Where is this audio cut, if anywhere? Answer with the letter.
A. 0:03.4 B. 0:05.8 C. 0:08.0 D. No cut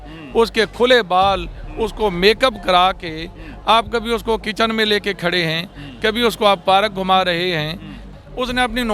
C